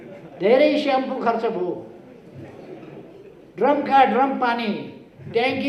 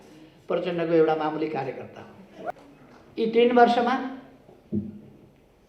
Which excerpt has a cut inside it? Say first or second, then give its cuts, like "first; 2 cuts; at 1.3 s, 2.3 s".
second; 1 cut; at 2.5 s